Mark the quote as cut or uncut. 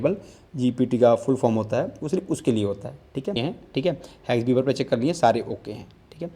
cut